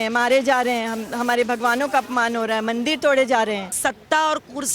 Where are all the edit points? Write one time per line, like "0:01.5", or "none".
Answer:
0:03.7